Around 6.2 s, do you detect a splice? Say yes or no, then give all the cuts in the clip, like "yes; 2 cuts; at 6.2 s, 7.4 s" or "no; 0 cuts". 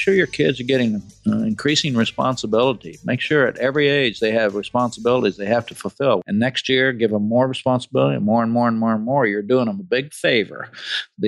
yes; 1 cut; at 6.2 s